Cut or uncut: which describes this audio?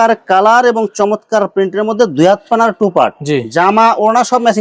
uncut